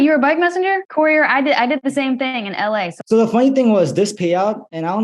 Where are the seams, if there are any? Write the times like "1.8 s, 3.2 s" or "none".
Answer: 0.8 s, 3.0 s